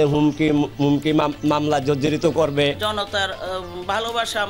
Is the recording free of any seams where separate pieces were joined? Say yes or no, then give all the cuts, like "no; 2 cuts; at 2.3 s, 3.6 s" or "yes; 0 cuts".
no; 1 cut; at 2.8 s